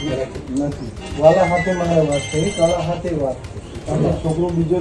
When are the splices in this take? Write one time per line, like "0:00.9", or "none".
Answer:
0:01.0
0:03.8